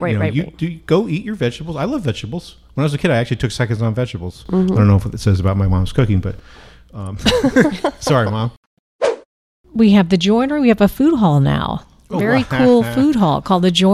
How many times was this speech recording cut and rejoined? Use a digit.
1